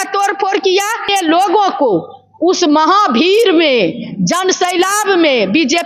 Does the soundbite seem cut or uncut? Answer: cut